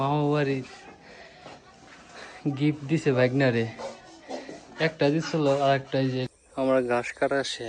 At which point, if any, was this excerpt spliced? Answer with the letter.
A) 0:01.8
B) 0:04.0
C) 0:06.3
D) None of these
C